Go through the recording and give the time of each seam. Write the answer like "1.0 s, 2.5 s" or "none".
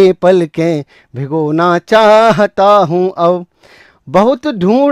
none